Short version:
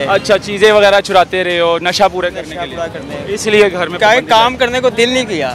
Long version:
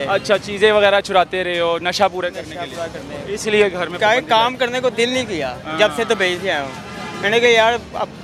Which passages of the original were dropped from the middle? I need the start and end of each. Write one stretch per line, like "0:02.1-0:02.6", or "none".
none